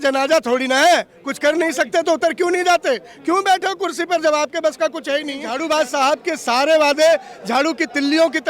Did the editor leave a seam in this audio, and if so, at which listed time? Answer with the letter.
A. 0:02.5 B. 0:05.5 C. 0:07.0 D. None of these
B